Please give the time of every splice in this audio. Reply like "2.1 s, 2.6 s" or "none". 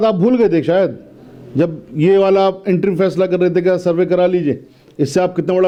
none

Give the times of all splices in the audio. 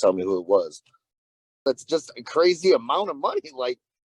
1.6 s

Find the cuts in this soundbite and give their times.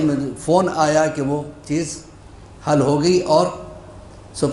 none

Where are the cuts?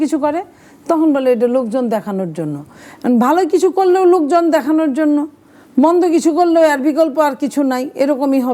none

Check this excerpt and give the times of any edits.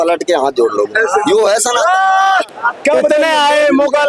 2.5 s

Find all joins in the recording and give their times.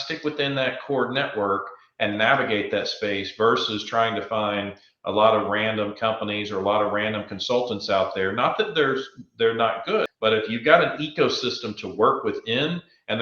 10.1 s

